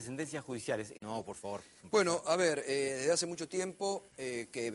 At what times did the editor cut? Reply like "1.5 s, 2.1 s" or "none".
none